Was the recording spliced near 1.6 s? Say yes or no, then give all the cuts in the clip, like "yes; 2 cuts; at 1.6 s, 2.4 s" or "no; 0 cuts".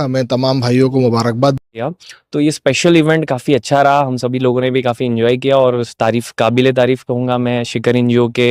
yes; 1 cut; at 1.6 s